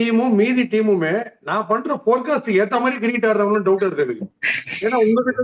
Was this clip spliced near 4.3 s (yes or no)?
no